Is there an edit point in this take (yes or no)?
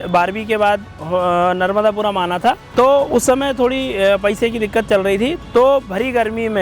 yes